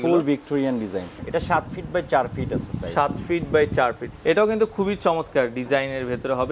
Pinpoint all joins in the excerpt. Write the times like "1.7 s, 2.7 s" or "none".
1.2 s, 4.0 s